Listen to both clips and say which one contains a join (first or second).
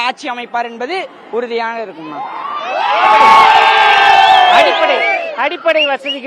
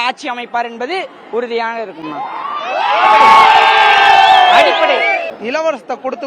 second